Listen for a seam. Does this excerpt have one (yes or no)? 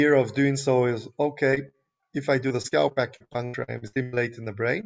yes